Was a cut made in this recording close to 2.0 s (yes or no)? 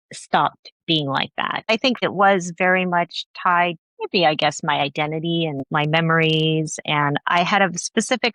yes